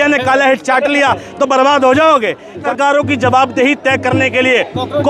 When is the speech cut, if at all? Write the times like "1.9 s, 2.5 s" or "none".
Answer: 2.6 s